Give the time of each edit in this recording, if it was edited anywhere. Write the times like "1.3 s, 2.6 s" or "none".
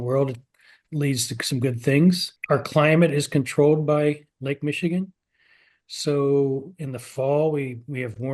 2.3 s